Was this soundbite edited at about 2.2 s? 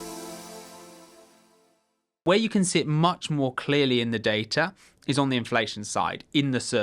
yes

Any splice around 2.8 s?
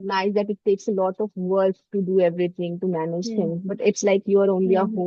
no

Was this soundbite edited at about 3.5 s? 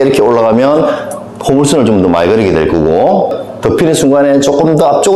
yes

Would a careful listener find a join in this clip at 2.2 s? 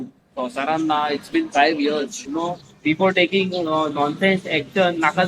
yes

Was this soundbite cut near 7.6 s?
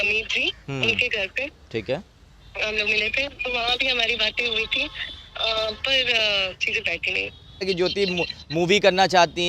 yes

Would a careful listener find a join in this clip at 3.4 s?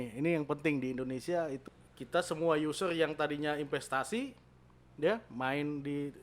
no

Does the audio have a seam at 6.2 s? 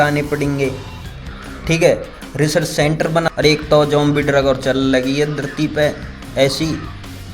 no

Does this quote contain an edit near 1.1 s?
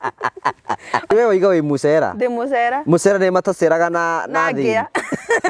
yes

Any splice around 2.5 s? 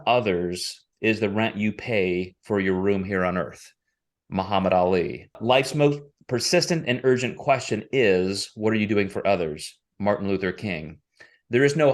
no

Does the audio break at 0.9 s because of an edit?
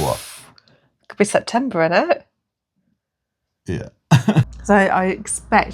no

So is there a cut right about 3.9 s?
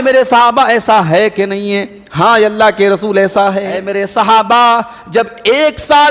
yes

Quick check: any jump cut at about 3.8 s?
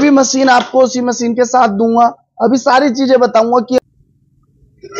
yes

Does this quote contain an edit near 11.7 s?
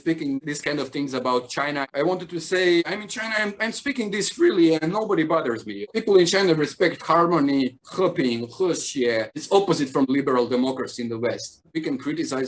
yes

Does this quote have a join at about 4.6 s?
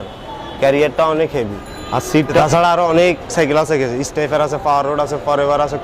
no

